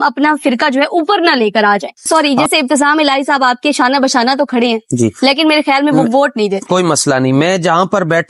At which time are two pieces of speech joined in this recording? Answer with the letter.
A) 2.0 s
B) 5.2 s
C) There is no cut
A